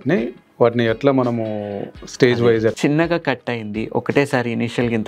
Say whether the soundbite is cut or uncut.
cut